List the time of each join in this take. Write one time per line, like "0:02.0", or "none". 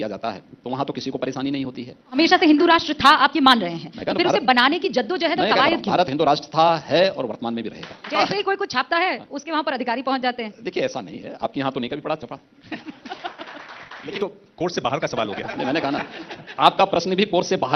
0:02.2
0:08.1
0:14.1